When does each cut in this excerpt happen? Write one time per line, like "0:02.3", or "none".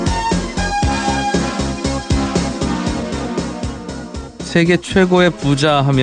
0:01.1